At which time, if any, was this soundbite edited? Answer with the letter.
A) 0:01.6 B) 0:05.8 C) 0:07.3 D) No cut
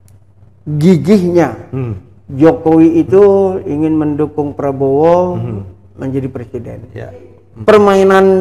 C